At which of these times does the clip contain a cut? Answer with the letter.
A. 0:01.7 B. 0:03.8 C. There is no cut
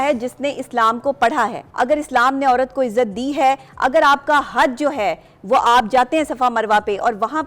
A